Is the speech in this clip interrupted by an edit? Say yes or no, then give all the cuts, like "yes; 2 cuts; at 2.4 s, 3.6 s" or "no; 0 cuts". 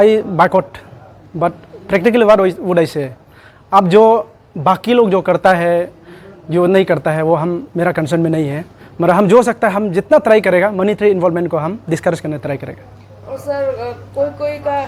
no; 0 cuts